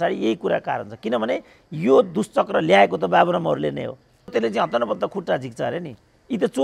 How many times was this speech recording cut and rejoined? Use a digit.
1